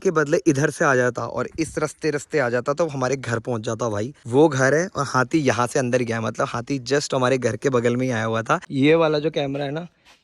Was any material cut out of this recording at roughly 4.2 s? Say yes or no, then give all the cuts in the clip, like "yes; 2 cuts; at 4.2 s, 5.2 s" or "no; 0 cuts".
yes; 2 cuts; at 4.2 s, 8.7 s